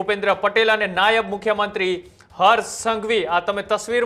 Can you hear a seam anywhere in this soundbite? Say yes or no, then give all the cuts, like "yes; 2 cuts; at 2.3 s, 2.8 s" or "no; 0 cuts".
no; 0 cuts